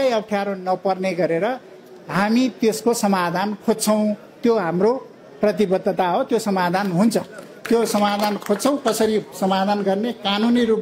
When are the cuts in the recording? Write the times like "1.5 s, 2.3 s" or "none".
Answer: none